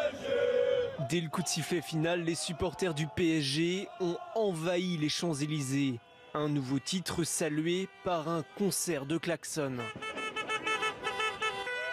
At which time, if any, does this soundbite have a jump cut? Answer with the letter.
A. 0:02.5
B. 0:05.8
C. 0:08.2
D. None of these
A